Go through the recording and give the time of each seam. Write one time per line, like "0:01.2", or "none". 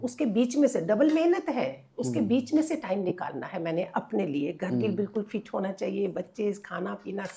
none